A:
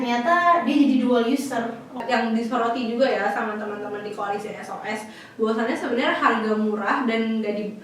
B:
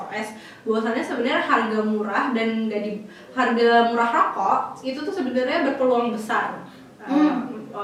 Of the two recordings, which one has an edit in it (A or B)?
A